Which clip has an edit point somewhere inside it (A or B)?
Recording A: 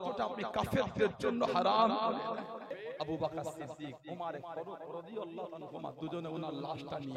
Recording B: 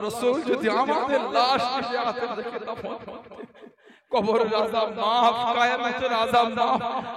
A